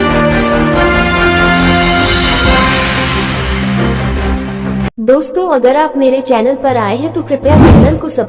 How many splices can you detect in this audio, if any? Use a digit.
0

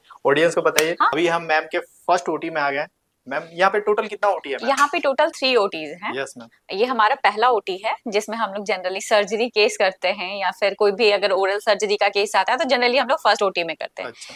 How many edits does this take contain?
0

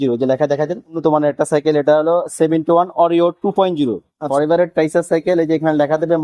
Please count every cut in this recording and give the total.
2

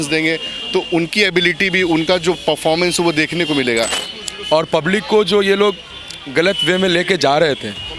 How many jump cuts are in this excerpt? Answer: 1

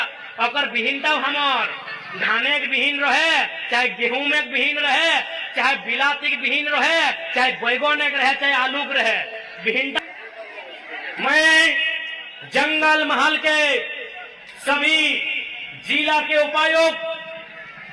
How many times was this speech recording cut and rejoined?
1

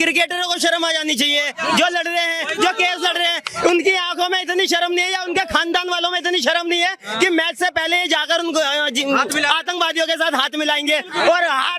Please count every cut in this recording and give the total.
0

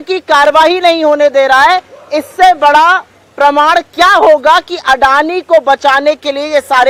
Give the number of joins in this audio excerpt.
0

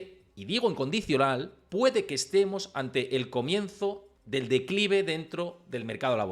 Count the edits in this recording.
1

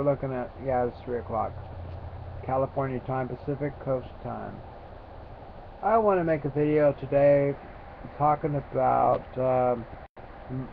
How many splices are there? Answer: 1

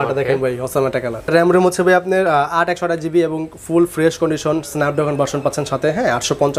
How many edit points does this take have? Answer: 1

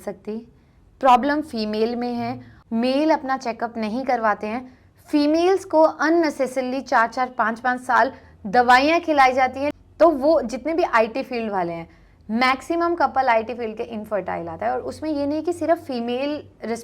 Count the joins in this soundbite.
2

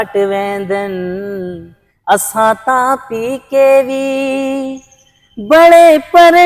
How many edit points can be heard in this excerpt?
0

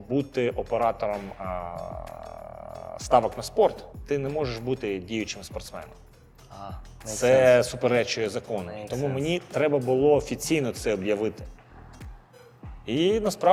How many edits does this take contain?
0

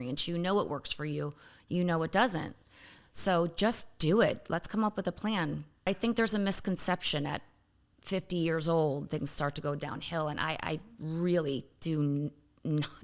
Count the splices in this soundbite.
1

